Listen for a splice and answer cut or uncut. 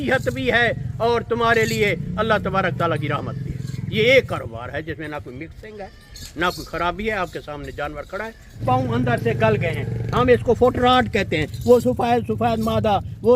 cut